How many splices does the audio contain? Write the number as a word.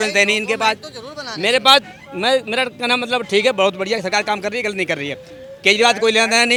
zero